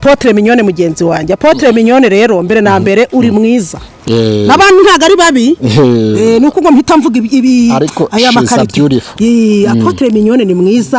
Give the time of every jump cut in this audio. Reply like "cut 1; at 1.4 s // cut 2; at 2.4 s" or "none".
none